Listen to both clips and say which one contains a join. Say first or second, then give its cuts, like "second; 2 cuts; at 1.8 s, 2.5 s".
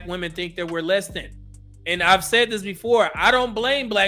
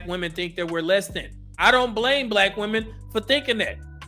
second; 1 cut; at 1.5 s